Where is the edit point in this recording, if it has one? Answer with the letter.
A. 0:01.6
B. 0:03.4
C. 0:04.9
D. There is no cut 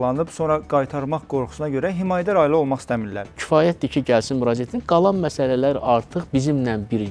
B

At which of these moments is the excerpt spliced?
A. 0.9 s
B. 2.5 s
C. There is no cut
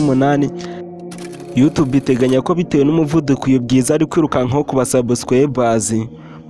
A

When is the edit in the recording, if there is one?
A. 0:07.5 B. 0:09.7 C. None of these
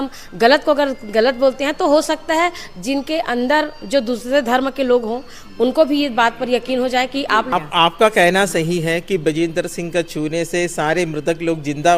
A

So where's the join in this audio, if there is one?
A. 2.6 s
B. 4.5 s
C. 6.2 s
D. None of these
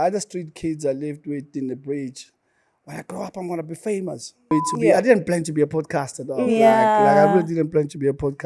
B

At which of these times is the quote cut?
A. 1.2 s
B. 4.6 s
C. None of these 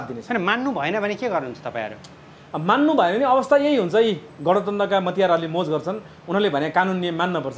C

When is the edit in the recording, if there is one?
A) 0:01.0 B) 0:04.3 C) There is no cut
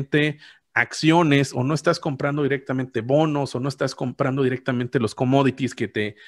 C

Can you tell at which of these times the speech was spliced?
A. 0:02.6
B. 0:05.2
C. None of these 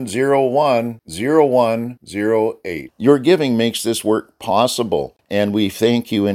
B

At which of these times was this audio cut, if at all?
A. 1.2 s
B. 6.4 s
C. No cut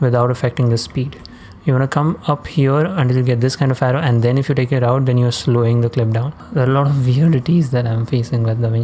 B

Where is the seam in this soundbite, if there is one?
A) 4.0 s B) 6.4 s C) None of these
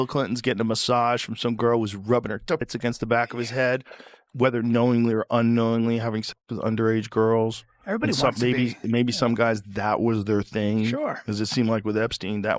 A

